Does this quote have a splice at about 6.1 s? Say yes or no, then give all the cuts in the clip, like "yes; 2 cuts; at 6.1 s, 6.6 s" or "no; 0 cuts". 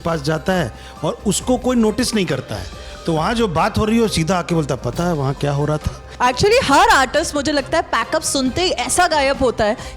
yes; 1 cut; at 6.1 s